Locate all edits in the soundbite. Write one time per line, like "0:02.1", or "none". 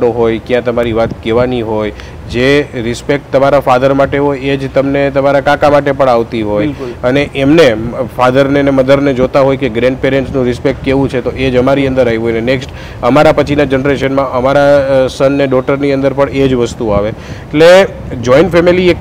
none